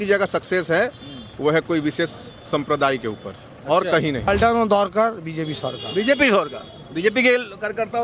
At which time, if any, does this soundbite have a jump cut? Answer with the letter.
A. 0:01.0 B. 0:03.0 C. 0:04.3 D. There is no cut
C